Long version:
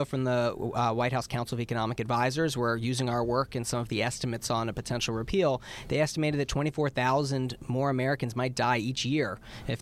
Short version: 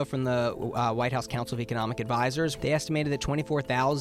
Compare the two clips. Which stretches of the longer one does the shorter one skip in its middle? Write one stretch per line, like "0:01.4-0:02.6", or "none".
0:02.5-0:05.8